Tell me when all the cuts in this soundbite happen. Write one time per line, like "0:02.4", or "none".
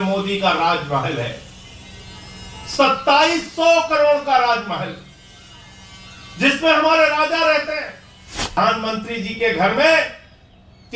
0:08.6